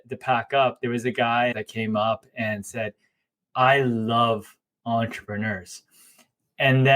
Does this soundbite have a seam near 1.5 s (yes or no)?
yes